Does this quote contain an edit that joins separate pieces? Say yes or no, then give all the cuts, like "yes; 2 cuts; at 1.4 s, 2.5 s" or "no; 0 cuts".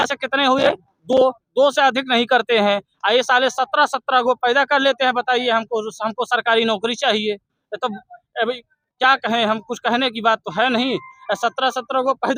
no; 0 cuts